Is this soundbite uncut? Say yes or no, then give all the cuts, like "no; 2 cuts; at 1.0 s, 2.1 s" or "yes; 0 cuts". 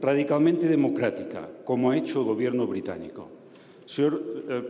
yes; 0 cuts